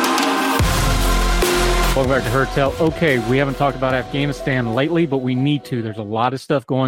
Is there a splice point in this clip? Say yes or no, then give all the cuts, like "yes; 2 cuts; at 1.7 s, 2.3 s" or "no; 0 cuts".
yes; 1 cut; at 1.9 s